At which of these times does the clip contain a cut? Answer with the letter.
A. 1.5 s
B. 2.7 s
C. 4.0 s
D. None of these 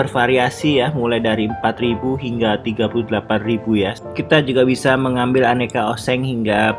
C